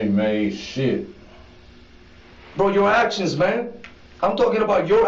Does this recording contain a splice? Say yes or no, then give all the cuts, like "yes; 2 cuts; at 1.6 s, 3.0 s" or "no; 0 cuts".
no; 0 cuts